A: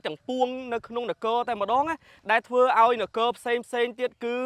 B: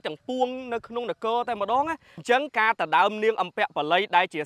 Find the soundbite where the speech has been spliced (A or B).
B